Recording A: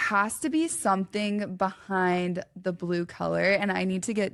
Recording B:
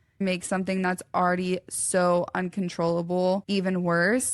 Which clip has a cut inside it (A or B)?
B